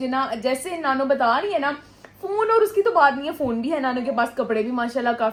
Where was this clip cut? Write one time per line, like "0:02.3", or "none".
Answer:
none